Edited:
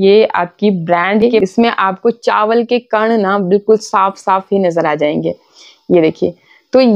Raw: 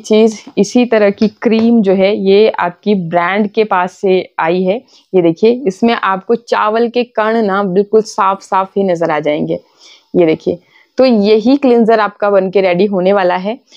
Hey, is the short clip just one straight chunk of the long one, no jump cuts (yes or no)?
no